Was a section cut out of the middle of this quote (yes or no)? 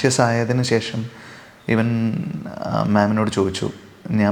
no